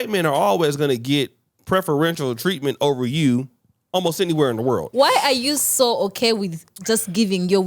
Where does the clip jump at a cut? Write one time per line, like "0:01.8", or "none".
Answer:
0:04.9